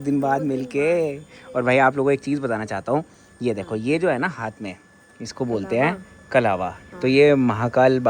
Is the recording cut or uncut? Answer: uncut